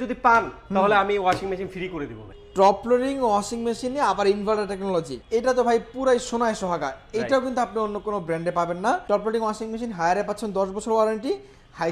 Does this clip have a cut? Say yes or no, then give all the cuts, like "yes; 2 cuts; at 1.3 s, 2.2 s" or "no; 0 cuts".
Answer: yes; 3 cuts; at 2.3 s, 5.2 s, 9.0 s